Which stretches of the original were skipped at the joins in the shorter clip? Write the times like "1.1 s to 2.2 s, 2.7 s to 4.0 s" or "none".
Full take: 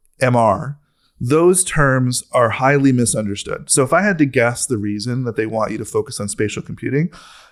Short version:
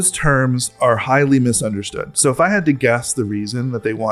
none